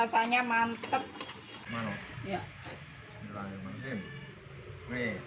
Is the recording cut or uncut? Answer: cut